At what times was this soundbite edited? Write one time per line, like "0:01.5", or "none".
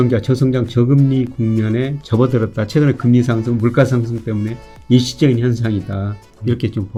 none